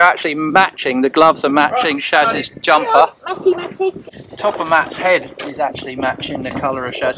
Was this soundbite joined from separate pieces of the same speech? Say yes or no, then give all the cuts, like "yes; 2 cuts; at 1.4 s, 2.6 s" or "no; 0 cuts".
yes; 1 cut; at 4.0 s